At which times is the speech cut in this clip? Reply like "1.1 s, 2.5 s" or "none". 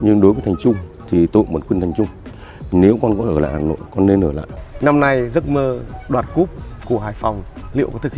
4.5 s